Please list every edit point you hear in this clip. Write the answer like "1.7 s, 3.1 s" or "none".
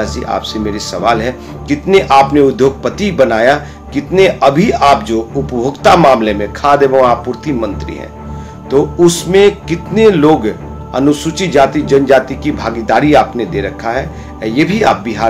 none